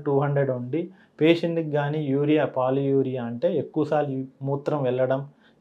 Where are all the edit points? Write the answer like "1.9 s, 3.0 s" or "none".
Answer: none